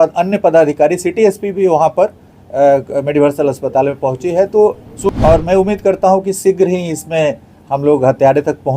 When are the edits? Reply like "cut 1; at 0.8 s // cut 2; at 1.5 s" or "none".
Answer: cut 1; at 5.1 s